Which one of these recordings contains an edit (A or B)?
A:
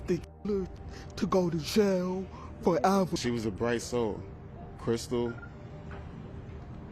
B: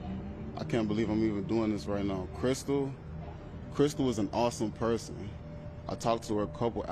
A